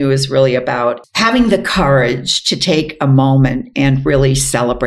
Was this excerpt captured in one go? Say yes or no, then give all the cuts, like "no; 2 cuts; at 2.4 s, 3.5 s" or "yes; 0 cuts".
no; 1 cut; at 1.0 s